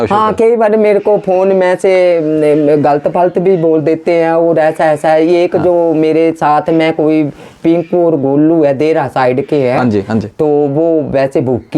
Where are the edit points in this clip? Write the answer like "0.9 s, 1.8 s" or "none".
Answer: none